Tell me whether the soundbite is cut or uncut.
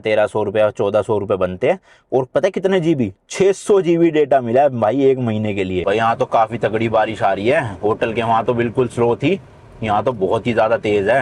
cut